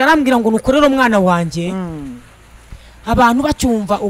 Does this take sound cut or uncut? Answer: uncut